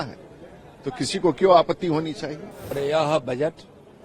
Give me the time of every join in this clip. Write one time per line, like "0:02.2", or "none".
0:02.7